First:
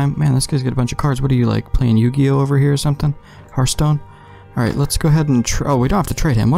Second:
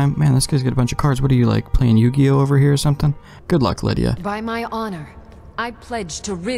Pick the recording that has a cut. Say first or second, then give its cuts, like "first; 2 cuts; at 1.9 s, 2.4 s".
second; 1 cut; at 3.4 s